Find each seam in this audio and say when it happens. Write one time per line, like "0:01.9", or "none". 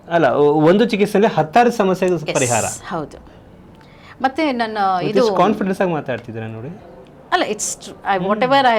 none